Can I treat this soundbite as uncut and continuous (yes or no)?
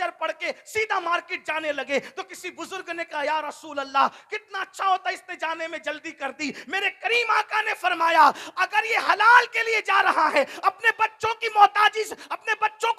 yes